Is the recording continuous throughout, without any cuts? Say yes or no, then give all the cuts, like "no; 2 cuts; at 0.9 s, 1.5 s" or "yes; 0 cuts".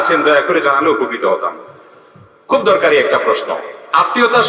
yes; 0 cuts